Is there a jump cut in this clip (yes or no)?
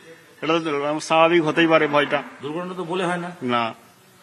no